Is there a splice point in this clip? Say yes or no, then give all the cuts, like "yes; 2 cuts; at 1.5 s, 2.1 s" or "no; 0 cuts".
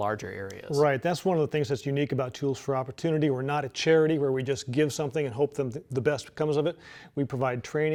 no; 0 cuts